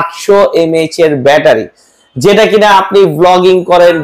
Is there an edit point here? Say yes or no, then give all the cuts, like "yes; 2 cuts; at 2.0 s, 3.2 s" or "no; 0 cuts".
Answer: no; 0 cuts